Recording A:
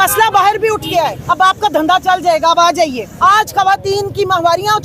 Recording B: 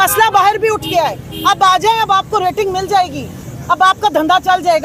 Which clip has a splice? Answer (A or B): A